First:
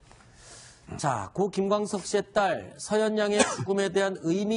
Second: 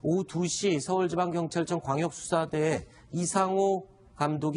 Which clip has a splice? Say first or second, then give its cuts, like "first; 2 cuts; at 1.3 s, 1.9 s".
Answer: second; 1 cut; at 1.1 s